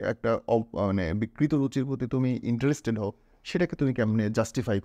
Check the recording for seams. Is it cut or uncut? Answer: uncut